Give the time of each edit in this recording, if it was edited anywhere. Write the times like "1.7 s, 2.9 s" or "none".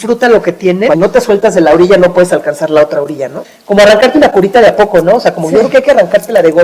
0.9 s, 3.5 s